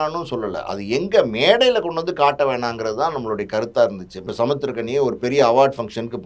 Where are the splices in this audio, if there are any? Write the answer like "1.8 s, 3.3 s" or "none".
4.2 s